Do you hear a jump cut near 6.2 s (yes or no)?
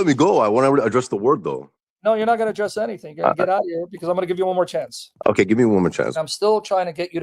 yes